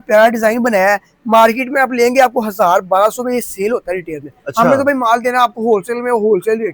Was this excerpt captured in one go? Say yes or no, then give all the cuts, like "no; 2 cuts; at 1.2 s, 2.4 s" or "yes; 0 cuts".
yes; 0 cuts